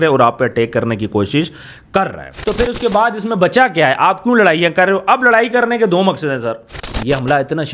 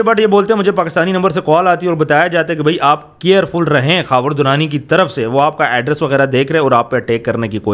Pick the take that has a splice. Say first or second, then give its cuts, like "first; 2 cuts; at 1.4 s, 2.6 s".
first; 2 cuts; at 2.3 s, 6.8 s